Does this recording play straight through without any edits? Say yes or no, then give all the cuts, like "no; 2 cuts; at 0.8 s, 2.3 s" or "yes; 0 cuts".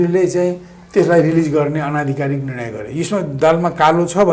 yes; 0 cuts